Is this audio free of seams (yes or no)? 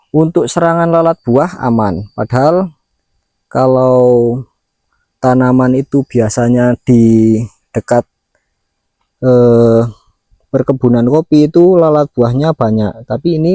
yes